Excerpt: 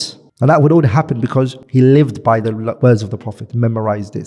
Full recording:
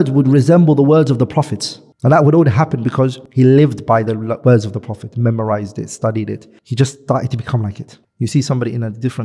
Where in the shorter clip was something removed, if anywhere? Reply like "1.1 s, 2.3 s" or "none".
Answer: none